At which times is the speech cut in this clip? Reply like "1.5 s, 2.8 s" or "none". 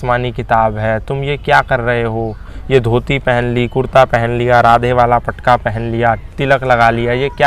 none